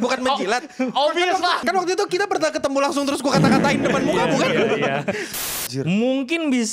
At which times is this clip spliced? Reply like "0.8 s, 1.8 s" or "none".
1.6 s, 5.3 s